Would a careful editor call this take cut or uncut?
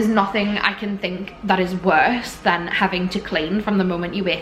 uncut